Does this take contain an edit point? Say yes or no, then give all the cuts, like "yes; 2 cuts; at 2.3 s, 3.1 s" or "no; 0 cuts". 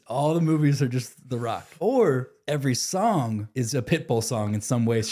yes; 3 cuts; at 1.7 s, 2.3 s, 3.5 s